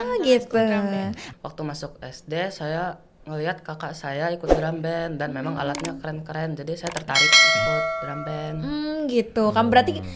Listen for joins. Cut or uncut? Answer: cut